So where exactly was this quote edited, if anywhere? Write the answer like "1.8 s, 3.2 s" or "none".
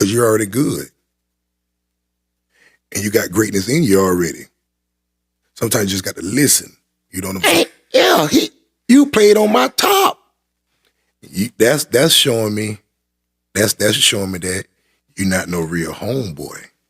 7.4 s